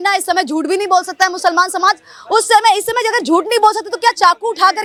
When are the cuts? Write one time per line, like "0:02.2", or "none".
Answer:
none